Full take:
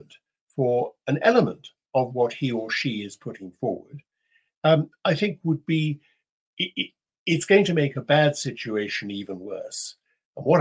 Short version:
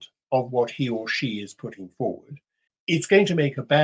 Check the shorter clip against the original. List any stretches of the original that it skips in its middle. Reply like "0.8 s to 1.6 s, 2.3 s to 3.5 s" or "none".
4.3 s to 7.0 s